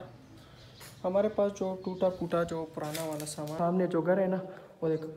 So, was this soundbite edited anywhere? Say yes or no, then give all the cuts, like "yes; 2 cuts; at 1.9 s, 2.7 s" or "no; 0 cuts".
yes; 1 cut; at 3.5 s